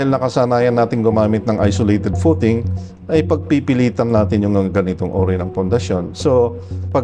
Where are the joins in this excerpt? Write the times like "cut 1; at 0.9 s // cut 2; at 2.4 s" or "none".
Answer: none